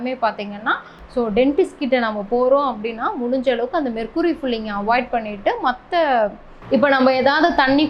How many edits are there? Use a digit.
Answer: 2